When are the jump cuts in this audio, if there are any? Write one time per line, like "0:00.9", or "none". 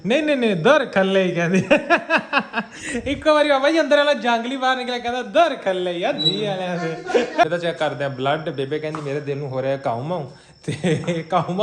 0:07.4